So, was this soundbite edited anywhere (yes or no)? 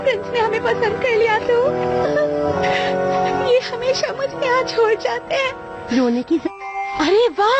no